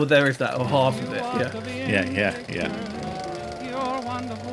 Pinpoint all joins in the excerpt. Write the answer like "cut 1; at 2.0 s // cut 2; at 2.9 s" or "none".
cut 1; at 2.8 s